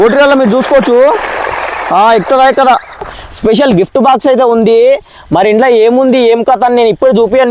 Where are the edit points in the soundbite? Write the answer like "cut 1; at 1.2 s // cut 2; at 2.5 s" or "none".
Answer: cut 1; at 3.1 s